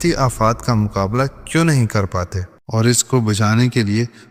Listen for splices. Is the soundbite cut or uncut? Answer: cut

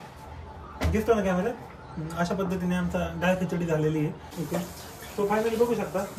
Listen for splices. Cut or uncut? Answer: cut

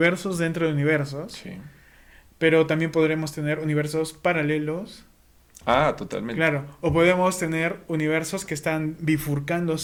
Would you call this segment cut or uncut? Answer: uncut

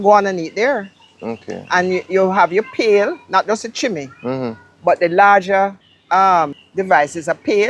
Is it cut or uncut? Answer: cut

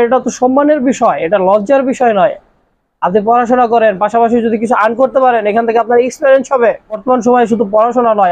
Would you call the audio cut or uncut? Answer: cut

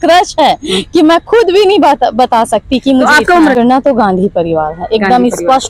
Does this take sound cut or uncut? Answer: cut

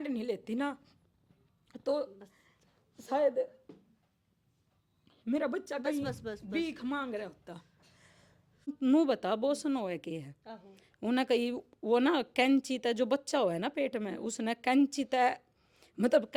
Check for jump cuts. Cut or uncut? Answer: cut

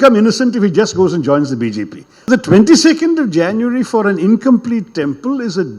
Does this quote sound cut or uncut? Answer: cut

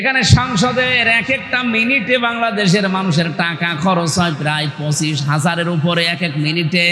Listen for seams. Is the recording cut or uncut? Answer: uncut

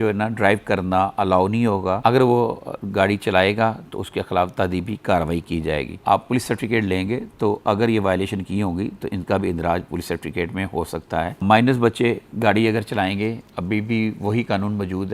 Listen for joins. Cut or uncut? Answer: cut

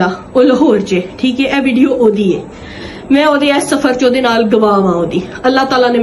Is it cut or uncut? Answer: uncut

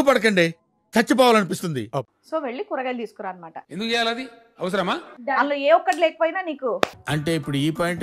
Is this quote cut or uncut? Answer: cut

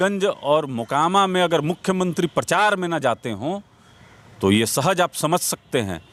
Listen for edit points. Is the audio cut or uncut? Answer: uncut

